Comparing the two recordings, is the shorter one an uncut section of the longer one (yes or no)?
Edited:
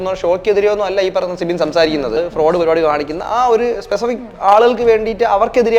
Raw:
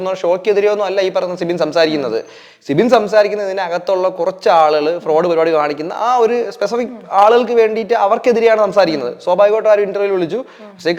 no